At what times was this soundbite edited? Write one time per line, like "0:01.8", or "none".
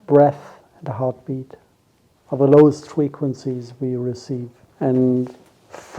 0:04.6